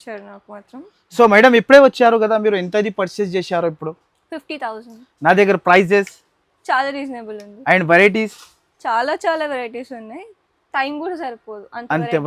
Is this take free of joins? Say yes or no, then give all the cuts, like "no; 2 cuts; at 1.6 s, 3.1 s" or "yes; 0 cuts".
yes; 0 cuts